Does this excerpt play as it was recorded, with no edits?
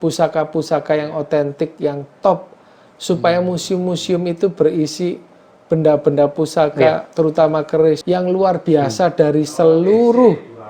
yes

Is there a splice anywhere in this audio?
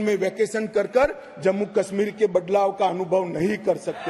no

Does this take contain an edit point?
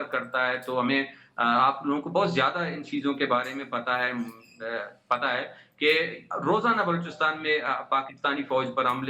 no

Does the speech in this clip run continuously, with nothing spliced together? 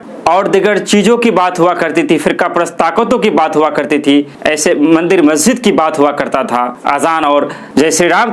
yes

